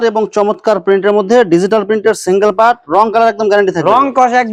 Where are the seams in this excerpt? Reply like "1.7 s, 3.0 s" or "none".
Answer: none